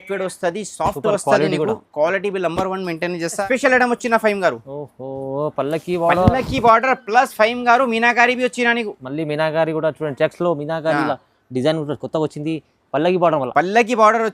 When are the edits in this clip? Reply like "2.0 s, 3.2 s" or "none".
3.4 s

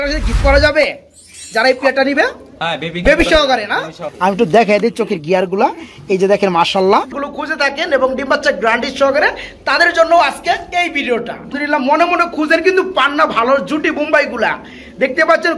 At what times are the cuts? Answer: 4.0 s, 7.2 s, 11.6 s

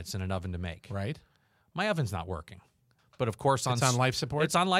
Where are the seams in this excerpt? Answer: 3.0 s

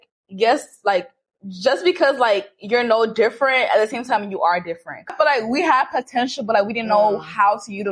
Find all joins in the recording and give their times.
5.1 s

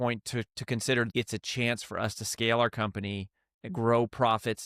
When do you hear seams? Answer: 1.1 s

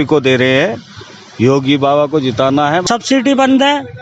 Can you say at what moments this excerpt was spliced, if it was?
2.9 s

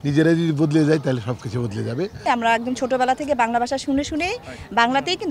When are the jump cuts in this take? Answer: 2.2 s

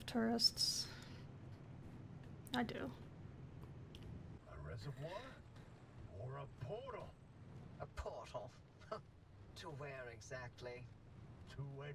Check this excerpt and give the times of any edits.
4.4 s

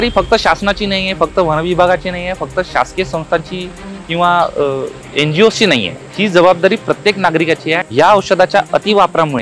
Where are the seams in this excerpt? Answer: 5.0 s, 6.0 s, 7.8 s

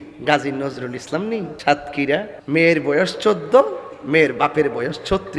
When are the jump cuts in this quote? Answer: 1.5 s, 2.4 s

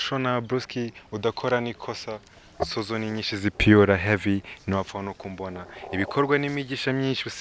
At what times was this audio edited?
none

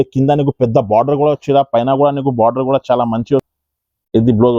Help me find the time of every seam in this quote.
3.5 s

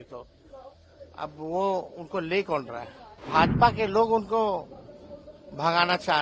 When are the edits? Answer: 3.2 s

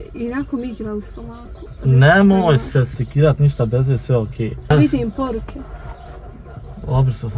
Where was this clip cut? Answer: 4.7 s

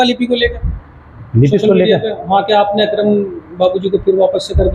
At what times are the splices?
none

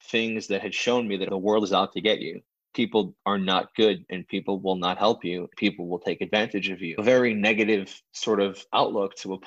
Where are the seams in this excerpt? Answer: 1.2 s, 5.5 s

